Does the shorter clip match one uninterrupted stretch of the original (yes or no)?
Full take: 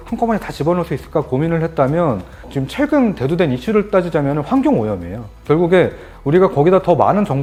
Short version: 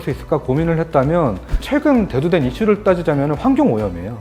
no